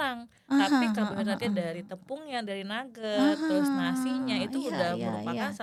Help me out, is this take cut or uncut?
uncut